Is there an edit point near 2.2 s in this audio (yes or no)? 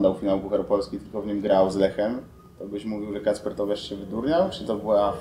no